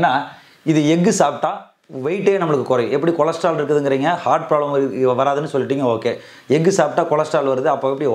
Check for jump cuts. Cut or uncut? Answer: uncut